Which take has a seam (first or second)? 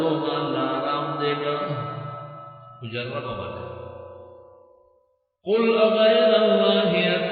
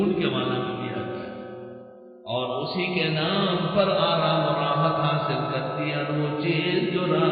second